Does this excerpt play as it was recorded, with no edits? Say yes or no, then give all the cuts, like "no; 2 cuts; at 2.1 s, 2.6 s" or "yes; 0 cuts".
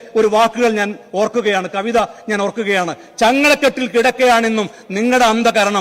yes; 0 cuts